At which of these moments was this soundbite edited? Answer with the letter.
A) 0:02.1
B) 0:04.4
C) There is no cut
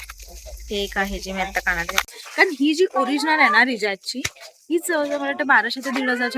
A